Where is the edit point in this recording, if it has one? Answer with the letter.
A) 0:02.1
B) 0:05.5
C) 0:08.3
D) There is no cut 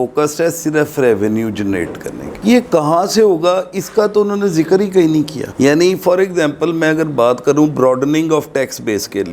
D